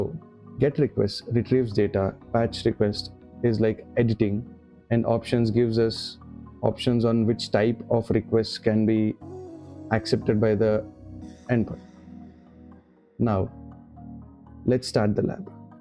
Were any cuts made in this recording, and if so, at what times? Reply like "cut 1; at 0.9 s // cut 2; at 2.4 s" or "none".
none